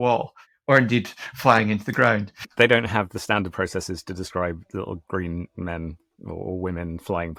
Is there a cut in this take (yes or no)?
no